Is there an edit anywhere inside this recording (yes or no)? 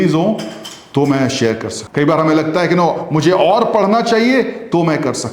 yes